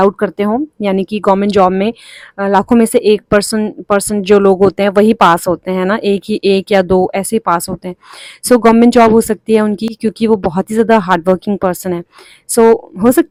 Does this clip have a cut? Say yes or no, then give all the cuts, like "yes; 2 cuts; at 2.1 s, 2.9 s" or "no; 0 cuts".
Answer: no; 0 cuts